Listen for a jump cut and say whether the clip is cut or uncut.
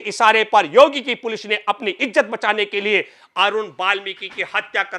uncut